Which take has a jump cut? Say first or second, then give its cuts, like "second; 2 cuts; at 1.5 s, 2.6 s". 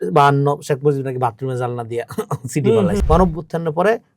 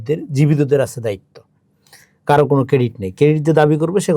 first; 1 cut; at 3.0 s